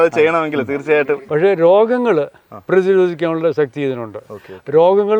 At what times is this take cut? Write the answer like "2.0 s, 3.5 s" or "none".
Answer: 1.2 s